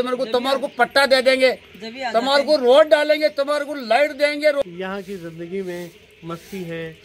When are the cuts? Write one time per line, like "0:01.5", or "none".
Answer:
0:04.6